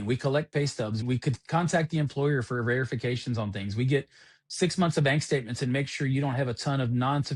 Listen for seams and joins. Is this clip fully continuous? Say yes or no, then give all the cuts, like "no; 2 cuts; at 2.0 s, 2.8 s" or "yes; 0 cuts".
yes; 0 cuts